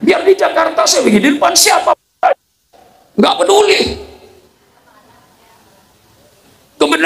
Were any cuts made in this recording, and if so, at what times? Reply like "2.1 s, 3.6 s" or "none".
none